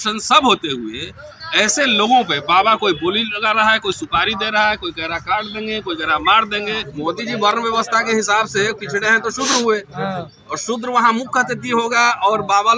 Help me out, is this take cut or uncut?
cut